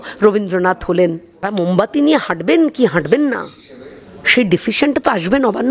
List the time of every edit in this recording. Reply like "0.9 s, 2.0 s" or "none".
1.5 s